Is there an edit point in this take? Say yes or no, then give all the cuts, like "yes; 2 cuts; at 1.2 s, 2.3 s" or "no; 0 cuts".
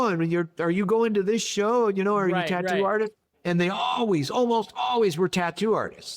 no; 0 cuts